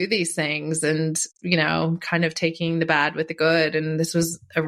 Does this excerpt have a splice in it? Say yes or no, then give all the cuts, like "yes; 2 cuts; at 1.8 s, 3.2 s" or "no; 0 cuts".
no; 0 cuts